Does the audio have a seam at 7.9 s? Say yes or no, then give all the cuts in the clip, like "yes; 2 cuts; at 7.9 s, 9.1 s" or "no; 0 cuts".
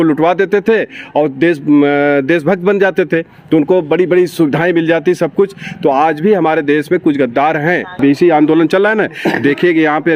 yes; 1 cut; at 7.9 s